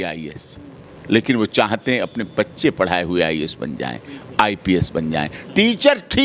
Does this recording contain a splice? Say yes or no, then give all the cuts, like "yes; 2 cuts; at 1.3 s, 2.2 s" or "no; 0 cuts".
no; 0 cuts